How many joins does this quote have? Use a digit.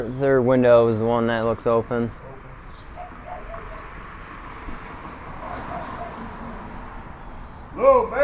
0